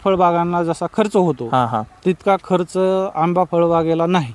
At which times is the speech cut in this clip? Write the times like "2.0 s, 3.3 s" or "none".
none